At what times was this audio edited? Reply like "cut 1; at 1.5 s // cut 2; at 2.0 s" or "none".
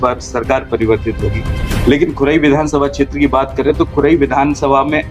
none